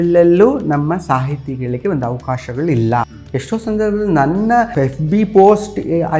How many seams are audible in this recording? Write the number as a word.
two